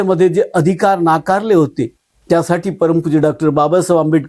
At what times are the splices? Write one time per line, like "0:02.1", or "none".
0:02.1

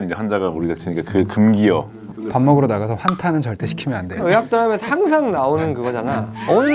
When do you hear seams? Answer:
none

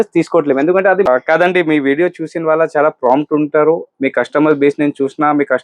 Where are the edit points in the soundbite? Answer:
0:01.1

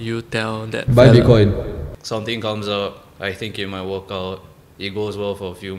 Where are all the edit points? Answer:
0:01.9

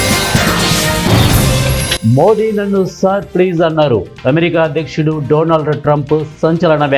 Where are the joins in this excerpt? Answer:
0:01.9

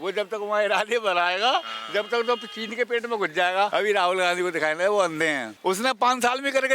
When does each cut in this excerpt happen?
0:03.7
0:05.5

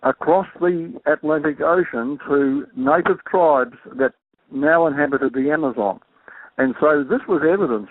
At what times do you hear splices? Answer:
none

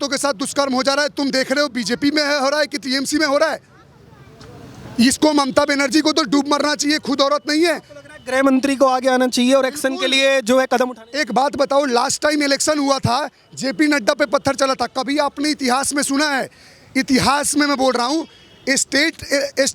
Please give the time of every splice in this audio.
none

